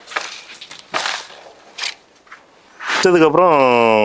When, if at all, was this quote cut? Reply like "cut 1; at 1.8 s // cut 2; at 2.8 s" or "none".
cut 1; at 3.0 s